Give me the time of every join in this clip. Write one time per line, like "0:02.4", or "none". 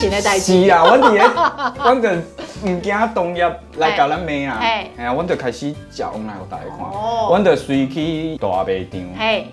none